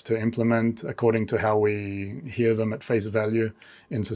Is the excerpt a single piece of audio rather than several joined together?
yes; 0 cuts

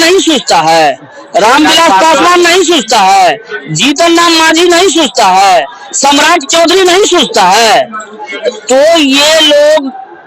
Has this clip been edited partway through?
no; 0 cuts

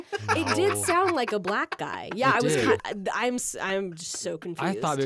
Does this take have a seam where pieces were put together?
yes; 1 cut; at 2.8 s

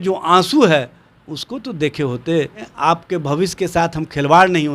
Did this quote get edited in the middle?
yes; 1 cut; at 2.7 s

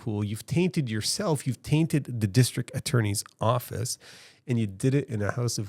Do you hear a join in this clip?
no; 0 cuts

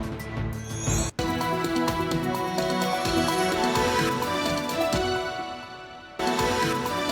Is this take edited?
yes; 1 cut; at 6.2 s

